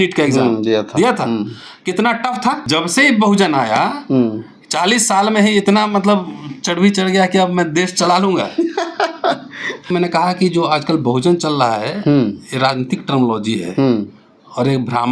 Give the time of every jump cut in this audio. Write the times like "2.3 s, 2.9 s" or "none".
2.7 s, 9.9 s

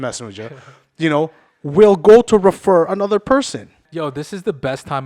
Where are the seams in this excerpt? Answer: 3.8 s

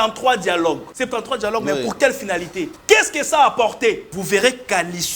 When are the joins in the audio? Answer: 0.9 s, 2.7 s, 4.1 s

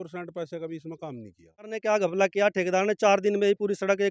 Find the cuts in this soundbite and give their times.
1.8 s

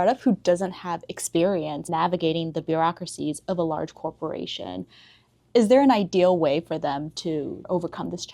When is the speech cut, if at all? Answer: 1.9 s

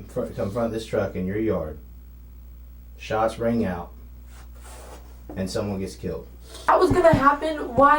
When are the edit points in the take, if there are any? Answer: 6.7 s

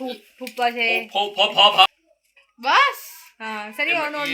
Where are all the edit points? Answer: none

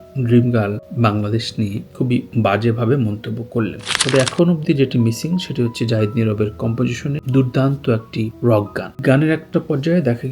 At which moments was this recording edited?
3.9 s

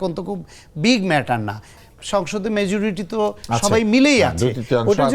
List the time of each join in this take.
1.7 s

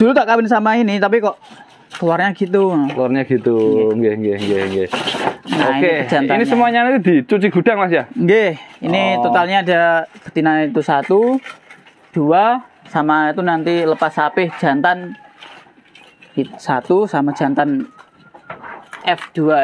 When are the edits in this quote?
none

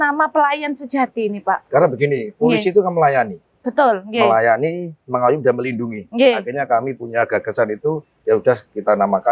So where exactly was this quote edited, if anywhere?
none

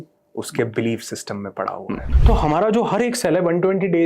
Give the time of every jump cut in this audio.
2.1 s

